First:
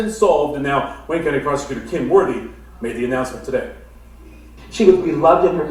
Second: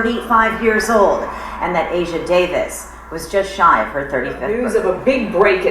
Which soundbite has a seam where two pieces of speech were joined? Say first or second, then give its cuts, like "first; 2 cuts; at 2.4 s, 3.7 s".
second; 1 cut; at 4.5 s